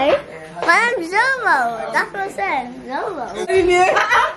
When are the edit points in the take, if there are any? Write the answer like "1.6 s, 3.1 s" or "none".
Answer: 3.4 s